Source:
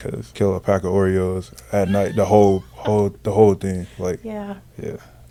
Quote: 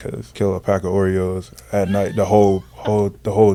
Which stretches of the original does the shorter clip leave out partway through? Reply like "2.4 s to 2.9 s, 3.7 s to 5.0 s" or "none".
none